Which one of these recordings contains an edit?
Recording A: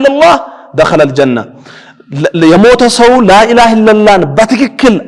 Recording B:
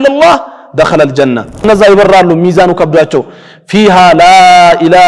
B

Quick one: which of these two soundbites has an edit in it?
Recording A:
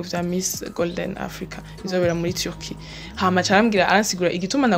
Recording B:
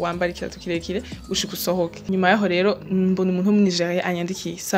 B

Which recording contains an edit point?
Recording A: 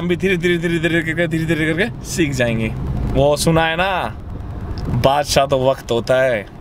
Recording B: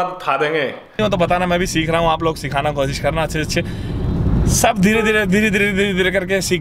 B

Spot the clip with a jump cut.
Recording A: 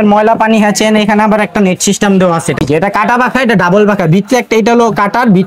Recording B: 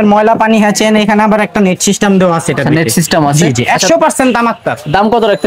A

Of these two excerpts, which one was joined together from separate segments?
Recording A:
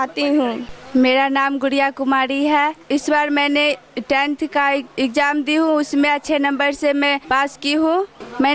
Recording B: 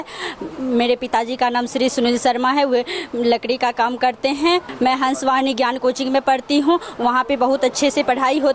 A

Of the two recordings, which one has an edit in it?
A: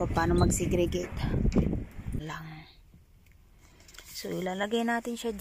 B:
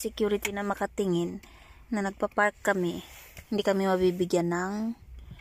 A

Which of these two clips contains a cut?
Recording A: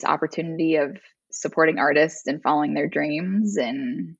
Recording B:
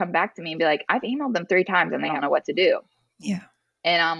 B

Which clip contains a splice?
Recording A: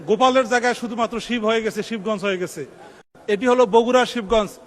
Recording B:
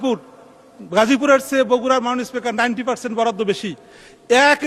A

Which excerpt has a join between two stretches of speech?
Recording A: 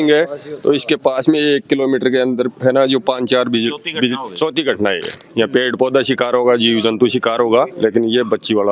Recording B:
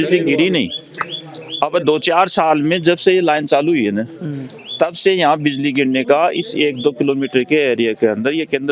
A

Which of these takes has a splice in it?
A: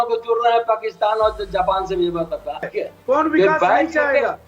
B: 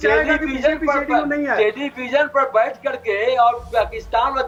A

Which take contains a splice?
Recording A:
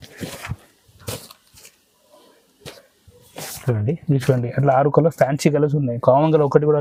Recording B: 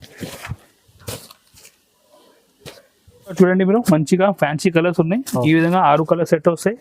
B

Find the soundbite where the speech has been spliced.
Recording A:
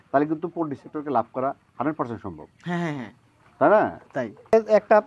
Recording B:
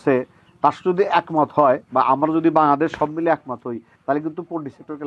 A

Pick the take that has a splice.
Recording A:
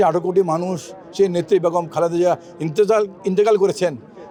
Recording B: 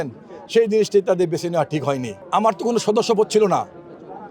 B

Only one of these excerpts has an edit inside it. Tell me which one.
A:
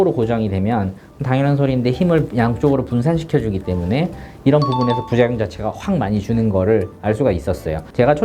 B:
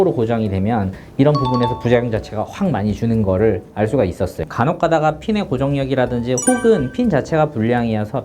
B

